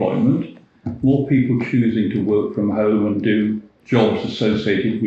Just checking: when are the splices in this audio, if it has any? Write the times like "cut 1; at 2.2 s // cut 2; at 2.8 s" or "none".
cut 1; at 3.7 s

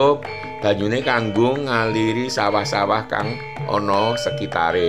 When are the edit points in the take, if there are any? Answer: none

